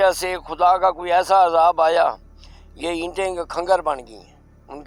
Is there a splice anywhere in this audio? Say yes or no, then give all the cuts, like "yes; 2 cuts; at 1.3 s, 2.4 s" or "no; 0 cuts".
no; 0 cuts